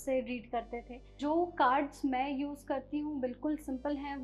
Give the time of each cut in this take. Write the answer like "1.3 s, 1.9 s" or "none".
1.2 s